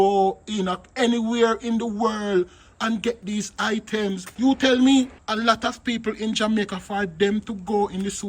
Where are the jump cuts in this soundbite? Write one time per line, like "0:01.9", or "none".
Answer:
0:04.3
0:05.2